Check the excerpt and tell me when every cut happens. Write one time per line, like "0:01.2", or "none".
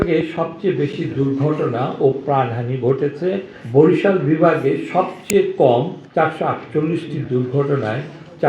0:03.5
0:06.0